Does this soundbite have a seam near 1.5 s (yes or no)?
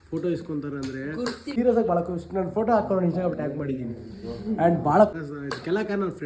yes